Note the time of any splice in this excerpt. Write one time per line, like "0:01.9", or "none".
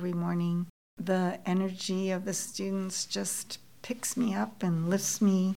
none